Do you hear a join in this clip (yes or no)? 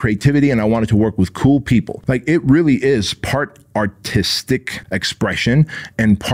yes